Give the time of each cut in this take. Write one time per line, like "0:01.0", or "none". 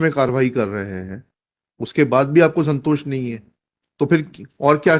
none